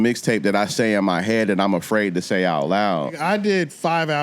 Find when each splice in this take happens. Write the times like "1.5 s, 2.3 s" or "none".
3.2 s

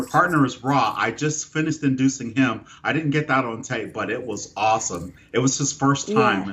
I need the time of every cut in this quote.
none

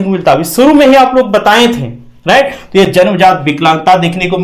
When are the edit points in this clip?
none

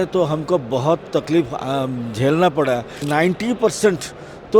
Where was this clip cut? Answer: 2.9 s

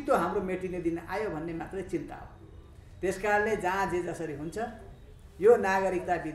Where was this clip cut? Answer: none

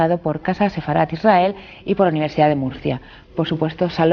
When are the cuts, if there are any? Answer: 1.4 s

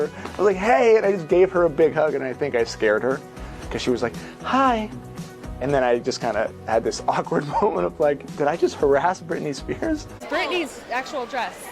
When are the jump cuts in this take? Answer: 10.2 s

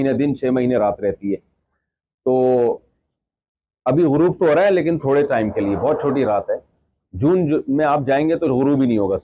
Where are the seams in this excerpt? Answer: none

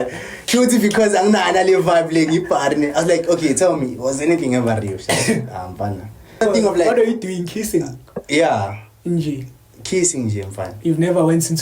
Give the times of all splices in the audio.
6.4 s

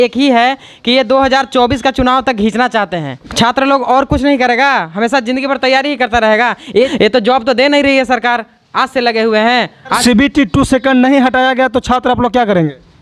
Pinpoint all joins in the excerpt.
3.2 s, 6.9 s, 10.0 s

